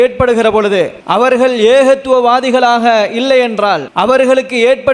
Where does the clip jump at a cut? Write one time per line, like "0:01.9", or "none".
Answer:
0:01.0
0:03.9

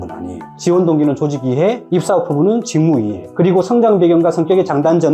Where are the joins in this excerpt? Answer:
none

